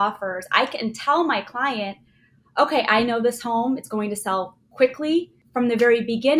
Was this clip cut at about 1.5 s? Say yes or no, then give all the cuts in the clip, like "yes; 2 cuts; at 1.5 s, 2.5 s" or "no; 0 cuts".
no; 1 cut; at 5.4 s